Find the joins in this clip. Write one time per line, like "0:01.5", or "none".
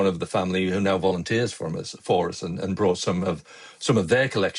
none